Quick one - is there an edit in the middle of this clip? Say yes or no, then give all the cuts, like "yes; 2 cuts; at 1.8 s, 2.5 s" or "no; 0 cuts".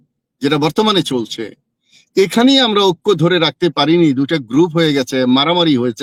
no; 0 cuts